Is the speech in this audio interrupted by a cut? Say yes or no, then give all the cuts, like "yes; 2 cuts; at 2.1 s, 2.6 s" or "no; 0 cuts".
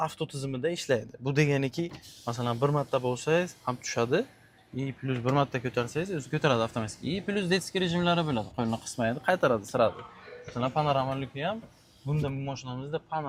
no; 0 cuts